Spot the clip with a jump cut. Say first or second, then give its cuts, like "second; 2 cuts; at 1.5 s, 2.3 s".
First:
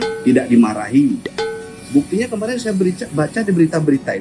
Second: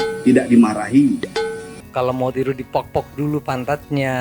second; 1 cut; at 1.3 s